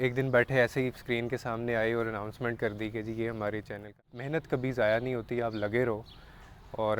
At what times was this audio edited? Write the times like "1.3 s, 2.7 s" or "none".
4.1 s